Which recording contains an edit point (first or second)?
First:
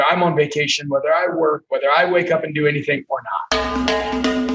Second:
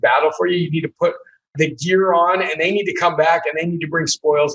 first